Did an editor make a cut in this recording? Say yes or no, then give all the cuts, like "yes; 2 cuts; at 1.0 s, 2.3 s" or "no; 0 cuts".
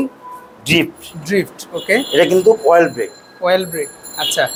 no; 0 cuts